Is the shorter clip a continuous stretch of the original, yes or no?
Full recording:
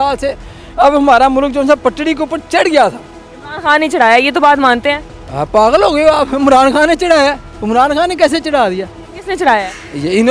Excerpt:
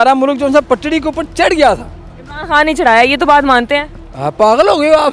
yes